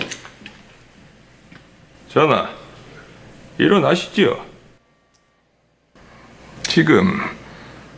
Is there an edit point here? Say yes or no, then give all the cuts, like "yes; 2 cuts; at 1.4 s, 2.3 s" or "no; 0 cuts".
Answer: yes; 1 cut; at 5.9 s